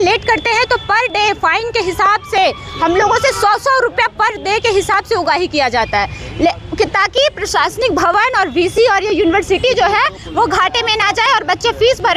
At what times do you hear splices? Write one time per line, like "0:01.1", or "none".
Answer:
none